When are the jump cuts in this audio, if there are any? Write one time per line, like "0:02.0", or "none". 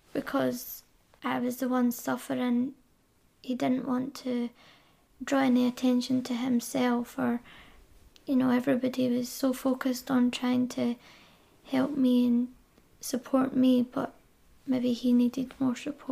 none